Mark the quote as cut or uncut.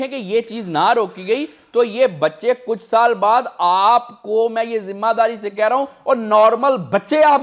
uncut